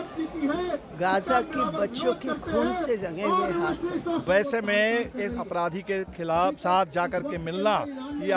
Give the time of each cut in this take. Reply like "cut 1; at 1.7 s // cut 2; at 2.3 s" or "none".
cut 1; at 4.2 s

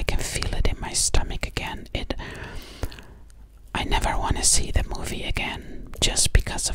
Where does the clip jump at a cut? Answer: none

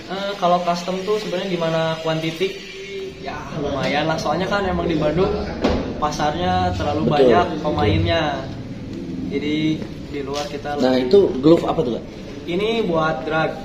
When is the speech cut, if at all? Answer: cut 1; at 3.2 s

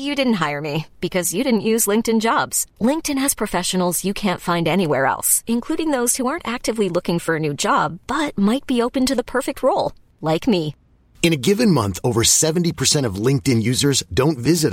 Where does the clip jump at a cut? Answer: none

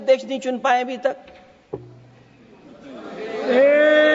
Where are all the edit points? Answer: none

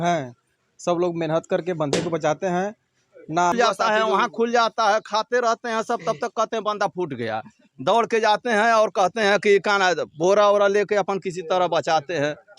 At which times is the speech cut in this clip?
cut 1; at 3.5 s

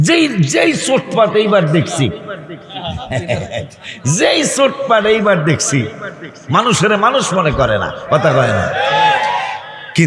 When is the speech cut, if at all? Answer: none

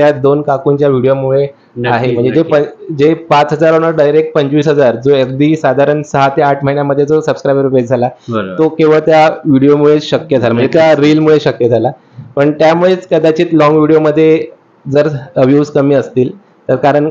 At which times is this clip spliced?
none

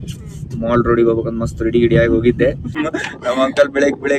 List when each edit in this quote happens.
cut 1; at 2.8 s

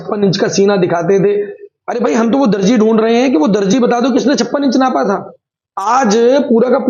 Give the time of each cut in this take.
none

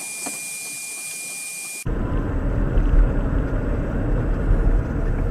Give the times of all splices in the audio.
none

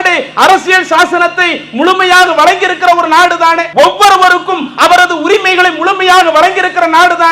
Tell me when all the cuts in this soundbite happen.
cut 1; at 3.6 s

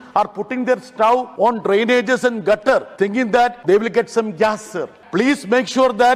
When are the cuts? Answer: cut 1; at 1.3 s // cut 2; at 3.1 s // cut 3; at 4.9 s

